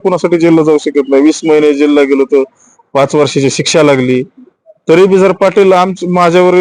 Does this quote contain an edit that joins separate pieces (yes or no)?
no